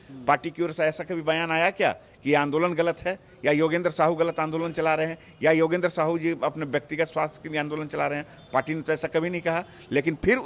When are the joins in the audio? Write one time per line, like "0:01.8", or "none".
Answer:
none